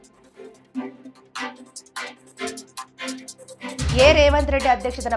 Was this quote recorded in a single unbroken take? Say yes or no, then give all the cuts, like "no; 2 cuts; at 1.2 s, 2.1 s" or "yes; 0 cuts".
no; 1 cut; at 3.9 s